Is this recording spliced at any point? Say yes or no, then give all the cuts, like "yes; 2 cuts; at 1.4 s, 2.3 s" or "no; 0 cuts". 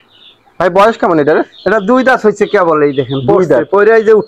no; 0 cuts